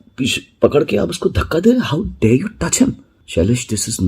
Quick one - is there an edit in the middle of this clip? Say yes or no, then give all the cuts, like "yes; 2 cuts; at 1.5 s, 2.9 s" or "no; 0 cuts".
yes; 1 cut; at 3.1 s